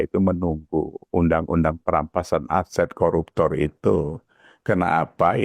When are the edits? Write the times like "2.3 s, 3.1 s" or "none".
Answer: none